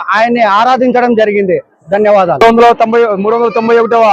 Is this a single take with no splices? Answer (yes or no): no